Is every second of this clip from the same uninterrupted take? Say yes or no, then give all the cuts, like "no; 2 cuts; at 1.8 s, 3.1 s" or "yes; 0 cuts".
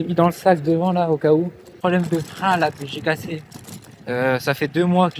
no; 1 cut; at 1.7 s